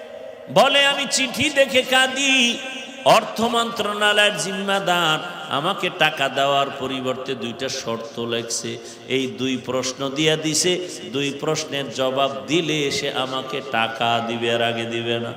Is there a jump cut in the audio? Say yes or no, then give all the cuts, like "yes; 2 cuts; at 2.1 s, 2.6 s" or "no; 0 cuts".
no; 0 cuts